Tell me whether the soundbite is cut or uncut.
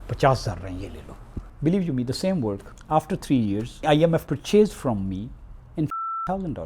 cut